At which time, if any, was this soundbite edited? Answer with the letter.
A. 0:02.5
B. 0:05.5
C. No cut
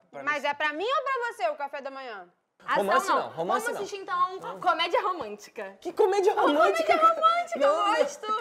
A